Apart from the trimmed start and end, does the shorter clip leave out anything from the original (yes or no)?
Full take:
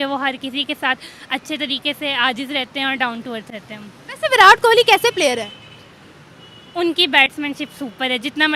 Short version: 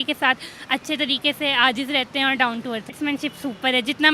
yes